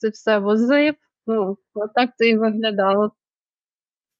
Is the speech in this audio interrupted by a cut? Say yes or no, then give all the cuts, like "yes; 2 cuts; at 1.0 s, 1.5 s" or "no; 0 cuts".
no; 0 cuts